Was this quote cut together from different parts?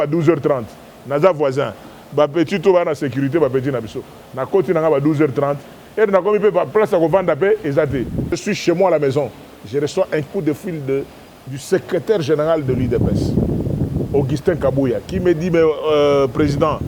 yes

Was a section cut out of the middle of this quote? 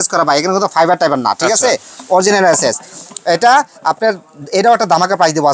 no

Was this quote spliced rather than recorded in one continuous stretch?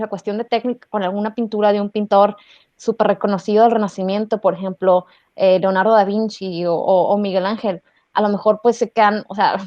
no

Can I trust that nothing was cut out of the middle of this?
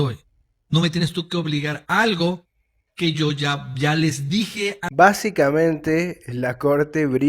no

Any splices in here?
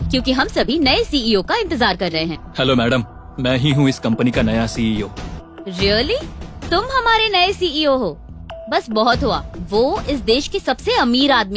yes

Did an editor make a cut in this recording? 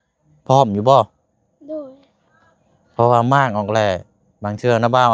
no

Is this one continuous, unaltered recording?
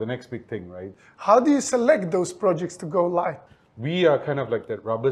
no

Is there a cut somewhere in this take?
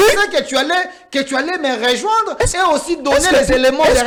no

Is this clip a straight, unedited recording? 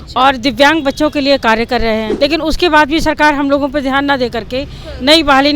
no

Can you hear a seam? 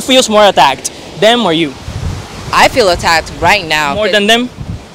no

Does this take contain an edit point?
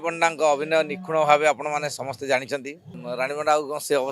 yes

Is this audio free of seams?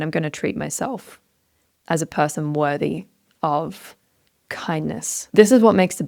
no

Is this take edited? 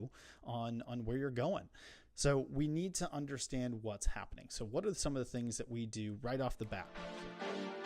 yes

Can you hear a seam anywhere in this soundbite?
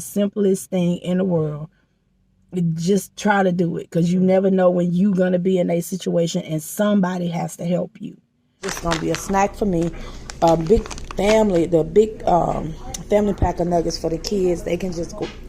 yes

